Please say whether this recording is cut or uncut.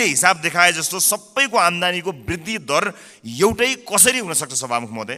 uncut